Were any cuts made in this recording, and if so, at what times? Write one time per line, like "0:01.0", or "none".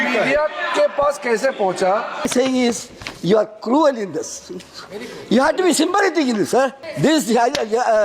0:02.3
0:06.8